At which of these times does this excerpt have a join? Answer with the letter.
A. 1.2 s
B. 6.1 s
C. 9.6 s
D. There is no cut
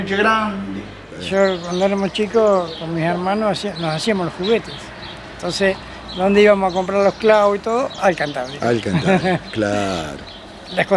A